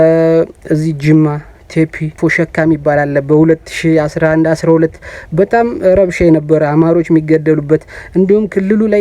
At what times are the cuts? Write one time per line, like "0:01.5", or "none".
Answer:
0:02.2